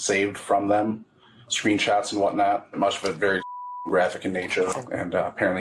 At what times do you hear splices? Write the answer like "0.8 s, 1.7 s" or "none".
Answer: 2.8 s, 4.8 s